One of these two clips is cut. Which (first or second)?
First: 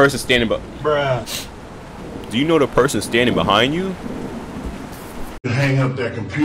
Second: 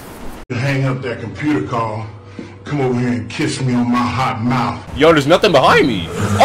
second